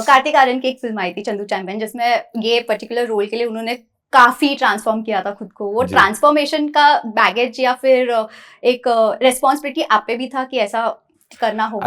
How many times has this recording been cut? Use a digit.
0